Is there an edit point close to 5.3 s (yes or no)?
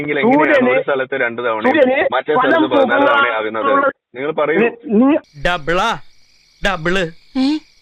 yes